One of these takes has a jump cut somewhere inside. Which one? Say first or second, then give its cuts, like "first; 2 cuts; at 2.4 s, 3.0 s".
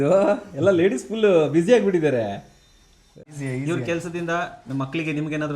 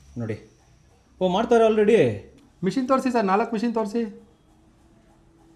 first; 1 cut; at 3.3 s